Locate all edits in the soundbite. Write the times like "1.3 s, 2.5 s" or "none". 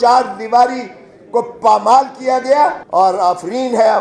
2.8 s